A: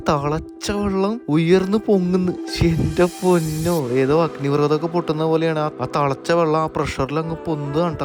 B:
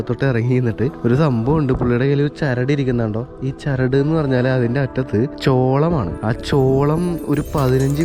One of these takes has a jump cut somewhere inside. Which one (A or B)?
B